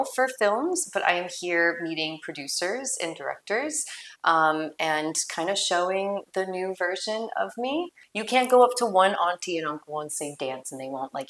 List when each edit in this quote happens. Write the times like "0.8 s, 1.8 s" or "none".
8.0 s